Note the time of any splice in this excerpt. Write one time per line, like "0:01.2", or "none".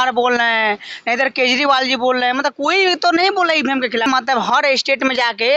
0:04.1